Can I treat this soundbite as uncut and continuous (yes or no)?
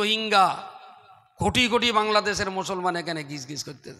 yes